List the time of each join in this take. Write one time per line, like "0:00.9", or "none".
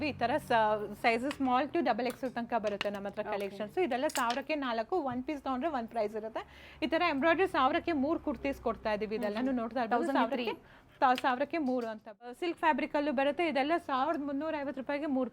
0:12.4